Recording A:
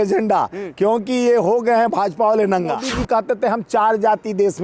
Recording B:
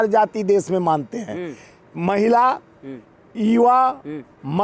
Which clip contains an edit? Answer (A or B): A